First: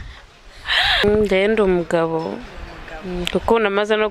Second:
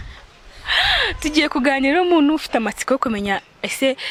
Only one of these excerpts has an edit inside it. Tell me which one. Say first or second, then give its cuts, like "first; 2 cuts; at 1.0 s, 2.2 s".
first; 1 cut; at 1.0 s